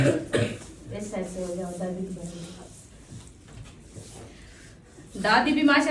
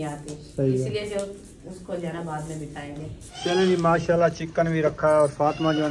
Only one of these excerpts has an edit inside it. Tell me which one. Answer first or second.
second